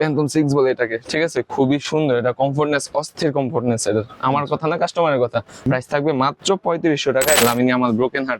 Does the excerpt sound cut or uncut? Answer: cut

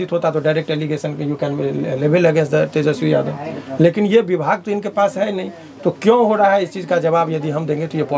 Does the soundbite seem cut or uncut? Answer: uncut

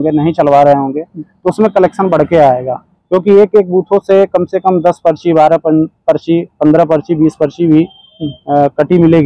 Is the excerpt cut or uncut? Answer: uncut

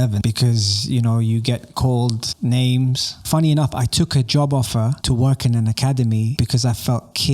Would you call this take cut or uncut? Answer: cut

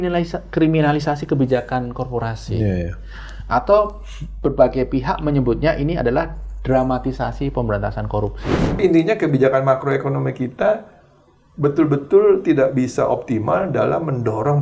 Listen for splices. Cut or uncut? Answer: cut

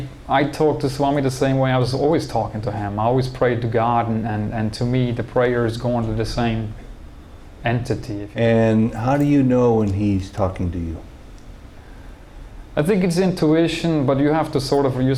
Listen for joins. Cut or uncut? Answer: cut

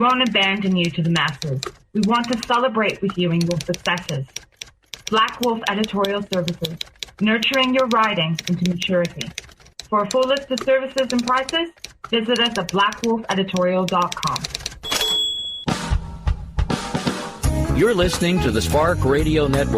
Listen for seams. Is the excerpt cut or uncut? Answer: cut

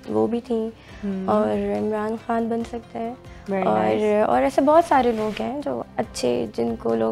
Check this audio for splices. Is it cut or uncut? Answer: uncut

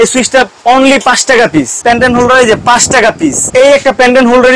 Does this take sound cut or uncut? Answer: cut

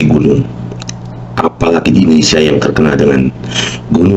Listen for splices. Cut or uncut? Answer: uncut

